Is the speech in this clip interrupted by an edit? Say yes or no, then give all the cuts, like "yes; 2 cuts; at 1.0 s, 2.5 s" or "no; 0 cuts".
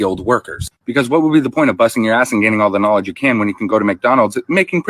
yes; 1 cut; at 0.9 s